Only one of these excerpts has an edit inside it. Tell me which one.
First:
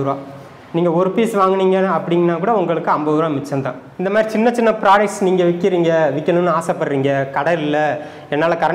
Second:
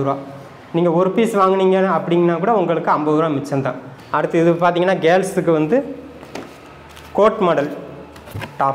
first; 1 cut; at 3.8 s

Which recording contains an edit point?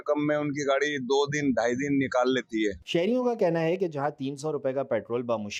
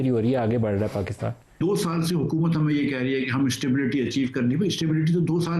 second; 1 cut; at 1.1 s

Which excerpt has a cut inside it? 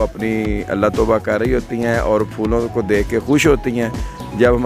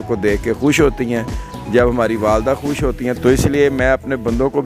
second; 1 cut; at 3.2 s

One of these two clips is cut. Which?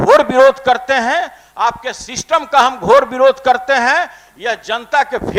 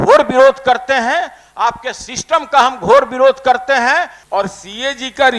second; 1 cut; at 4.2 s

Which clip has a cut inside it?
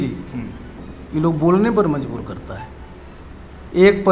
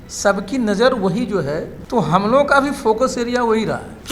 second; 1 cut; at 1.8 s

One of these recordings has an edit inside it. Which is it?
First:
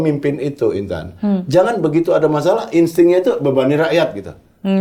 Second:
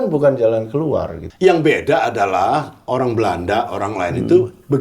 second; 1 cut; at 1.2 s

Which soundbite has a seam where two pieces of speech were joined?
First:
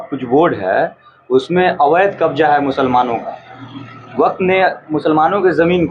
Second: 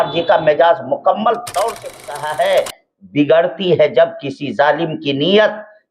second; 1 cut; at 1.8 s

